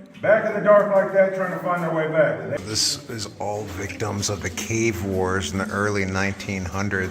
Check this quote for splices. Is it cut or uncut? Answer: cut